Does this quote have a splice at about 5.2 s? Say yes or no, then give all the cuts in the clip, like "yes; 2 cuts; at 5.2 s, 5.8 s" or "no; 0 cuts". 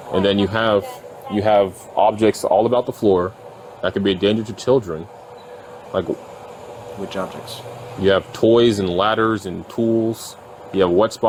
no; 0 cuts